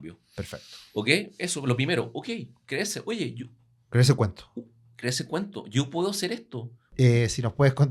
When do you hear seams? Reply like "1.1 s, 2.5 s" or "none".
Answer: 6.8 s